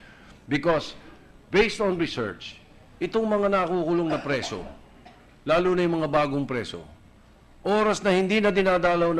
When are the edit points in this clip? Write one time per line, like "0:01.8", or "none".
0:02.5